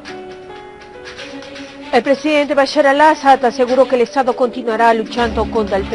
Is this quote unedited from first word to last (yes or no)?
no